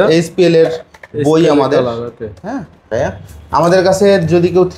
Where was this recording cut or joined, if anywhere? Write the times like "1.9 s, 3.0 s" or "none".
2.8 s